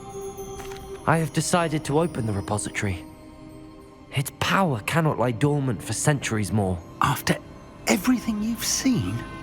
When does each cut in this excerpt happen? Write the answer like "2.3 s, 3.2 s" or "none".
1.0 s